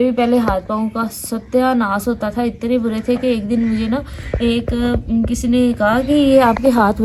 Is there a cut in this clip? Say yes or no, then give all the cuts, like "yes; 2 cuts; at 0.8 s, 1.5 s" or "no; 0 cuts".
no; 0 cuts